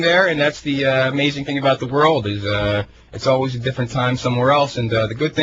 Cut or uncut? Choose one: cut